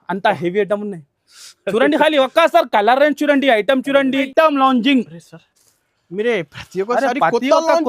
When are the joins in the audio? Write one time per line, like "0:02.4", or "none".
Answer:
0:04.3

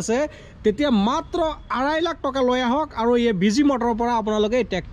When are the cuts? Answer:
none

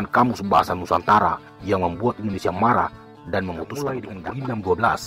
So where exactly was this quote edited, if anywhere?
0:04.1

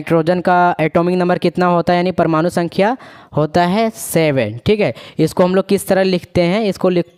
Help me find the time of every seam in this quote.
none

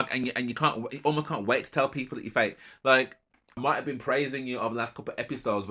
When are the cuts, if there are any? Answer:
0:03.6

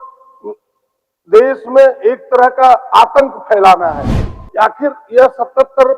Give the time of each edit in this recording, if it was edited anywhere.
0:04.1

